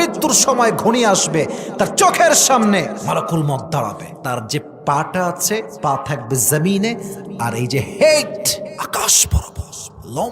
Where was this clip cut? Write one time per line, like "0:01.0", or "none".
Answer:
0:03.0
0:04.1
0:05.7
0:08.7

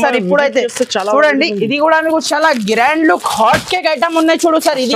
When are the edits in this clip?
0:02.2

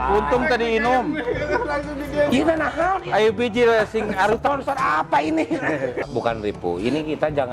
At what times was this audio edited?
0:06.1

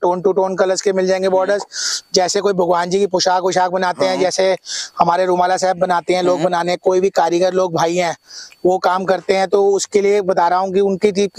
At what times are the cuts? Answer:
none

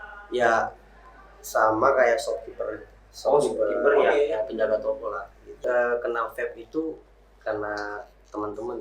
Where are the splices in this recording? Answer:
0:05.6

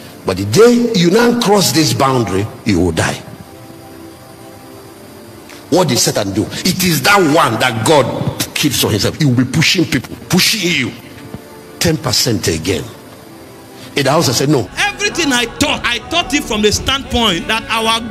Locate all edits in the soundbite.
0:14.7

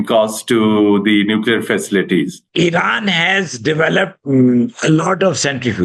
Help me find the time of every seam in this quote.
0:02.4

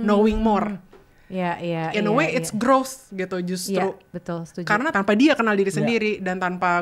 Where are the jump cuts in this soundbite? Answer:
0:04.9

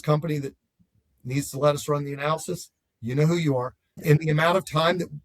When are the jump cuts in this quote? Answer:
0:04.0

